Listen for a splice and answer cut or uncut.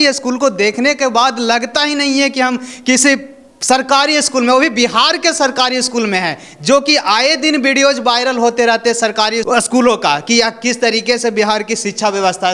uncut